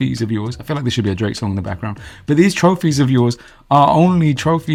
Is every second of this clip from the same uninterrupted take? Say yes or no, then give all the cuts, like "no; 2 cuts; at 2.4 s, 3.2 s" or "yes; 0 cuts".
yes; 0 cuts